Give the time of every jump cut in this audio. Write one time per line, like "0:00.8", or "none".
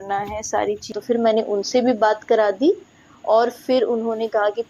0:01.0